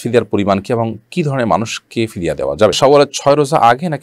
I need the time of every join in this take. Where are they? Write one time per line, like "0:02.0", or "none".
0:02.8

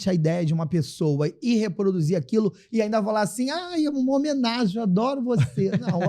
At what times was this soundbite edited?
none

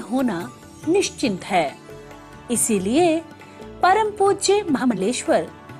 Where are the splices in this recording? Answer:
0:01.6
0:04.9

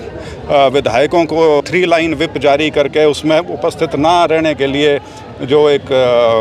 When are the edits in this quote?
0:01.7

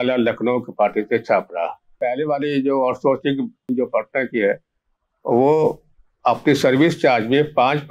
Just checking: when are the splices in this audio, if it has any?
0:01.9
0:03.7

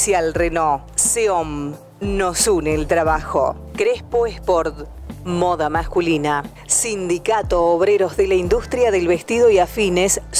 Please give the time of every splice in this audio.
none

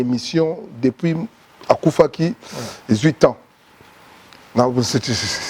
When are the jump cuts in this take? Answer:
none

